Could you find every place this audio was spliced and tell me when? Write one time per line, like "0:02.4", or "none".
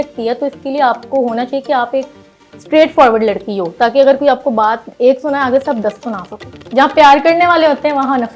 0:06.5